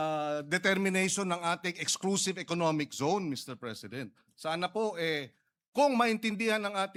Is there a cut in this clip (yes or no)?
no